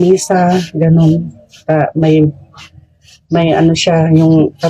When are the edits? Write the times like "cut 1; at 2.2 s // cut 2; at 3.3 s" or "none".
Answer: none